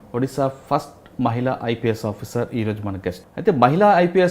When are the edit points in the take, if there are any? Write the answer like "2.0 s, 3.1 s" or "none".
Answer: 3.3 s